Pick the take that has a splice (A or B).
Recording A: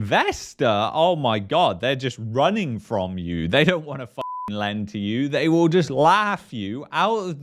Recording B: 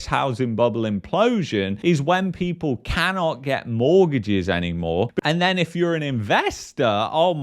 B